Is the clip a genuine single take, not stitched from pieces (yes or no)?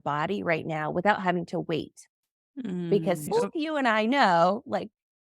no